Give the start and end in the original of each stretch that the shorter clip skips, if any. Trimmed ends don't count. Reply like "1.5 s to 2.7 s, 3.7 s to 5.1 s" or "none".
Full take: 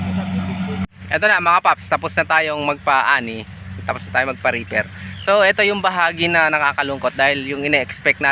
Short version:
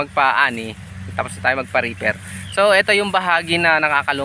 none